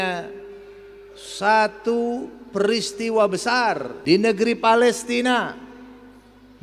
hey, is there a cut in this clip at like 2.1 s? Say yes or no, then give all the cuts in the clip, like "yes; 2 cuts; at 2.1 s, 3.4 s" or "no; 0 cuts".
no; 1 cut; at 3.9 s